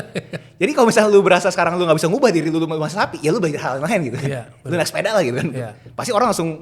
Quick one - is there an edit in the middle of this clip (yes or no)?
no